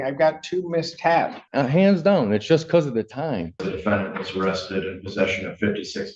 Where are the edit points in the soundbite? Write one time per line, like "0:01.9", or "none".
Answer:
0:01.4
0:03.7